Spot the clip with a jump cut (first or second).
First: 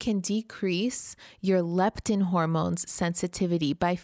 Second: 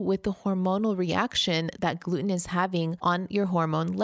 second